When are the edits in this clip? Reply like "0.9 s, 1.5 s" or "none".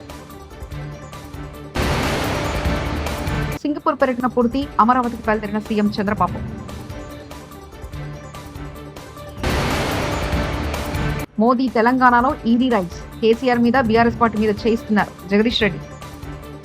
1.7 s